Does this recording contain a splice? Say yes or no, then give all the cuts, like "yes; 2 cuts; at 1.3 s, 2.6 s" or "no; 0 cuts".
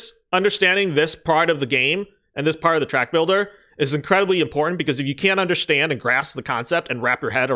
no; 0 cuts